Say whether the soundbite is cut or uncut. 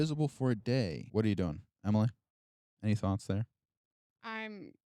cut